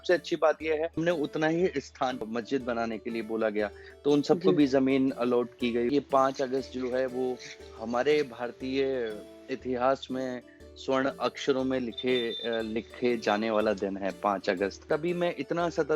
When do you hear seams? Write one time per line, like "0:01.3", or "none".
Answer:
0:01.0
0:02.3
0:05.9
0:14.9